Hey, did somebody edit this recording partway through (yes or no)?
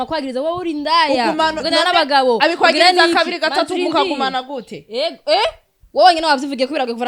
no